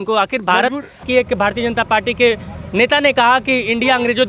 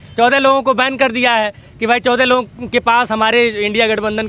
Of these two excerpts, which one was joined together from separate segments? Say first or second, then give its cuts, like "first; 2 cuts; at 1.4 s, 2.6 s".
first; 1 cut; at 1.0 s